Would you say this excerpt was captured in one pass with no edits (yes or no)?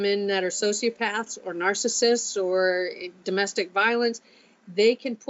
yes